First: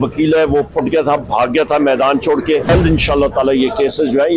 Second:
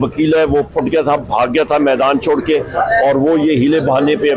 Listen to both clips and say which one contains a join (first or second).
first